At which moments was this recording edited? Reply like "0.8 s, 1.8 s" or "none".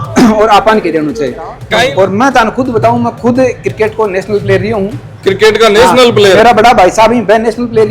1.7 s